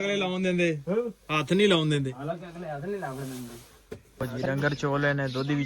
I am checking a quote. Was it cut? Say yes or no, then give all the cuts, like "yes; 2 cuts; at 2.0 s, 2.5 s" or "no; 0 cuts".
yes; 1 cut; at 4.3 s